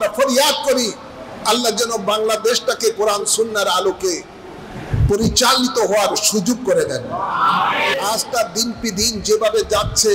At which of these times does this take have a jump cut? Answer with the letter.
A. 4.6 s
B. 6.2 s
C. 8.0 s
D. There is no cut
C